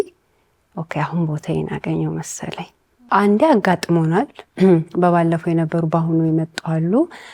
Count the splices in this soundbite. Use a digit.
1